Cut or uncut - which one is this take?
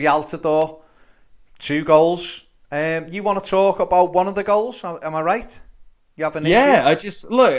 uncut